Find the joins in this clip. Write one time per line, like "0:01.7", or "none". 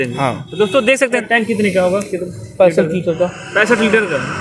0:01.2